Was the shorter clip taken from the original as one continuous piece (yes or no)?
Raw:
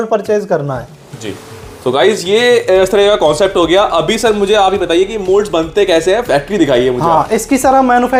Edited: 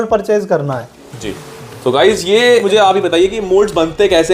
no